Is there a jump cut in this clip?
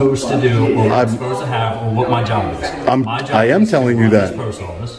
no; 0 cuts

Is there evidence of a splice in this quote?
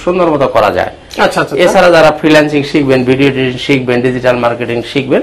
no; 0 cuts

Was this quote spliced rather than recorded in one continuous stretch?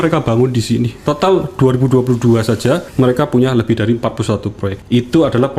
yes; 3 cuts; at 0.9 s, 2.9 s, 4.7 s

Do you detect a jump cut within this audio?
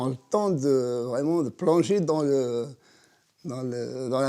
no; 0 cuts

